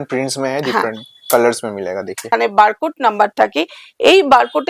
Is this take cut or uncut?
cut